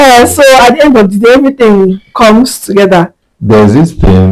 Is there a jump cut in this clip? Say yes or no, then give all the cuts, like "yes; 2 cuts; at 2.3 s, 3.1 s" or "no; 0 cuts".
yes; 1 cut; at 3.2 s